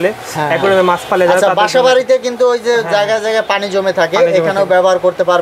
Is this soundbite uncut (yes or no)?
yes